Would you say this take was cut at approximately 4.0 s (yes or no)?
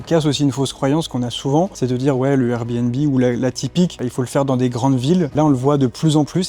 yes